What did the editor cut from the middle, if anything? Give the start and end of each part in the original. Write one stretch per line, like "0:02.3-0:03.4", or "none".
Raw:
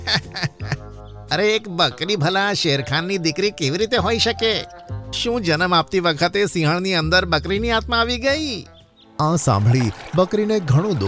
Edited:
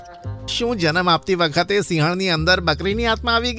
none